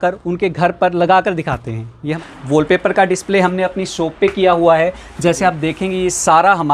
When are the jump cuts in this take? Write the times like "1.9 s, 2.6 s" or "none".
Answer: 2.1 s